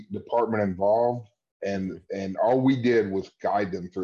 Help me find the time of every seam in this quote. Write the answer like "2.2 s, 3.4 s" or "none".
none